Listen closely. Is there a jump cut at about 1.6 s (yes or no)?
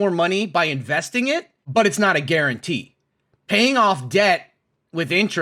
yes